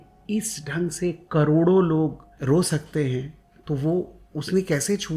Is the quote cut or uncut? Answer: cut